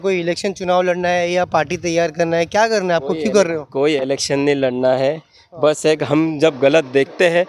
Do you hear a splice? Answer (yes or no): no